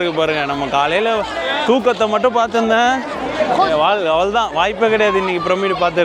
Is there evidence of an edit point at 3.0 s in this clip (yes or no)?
no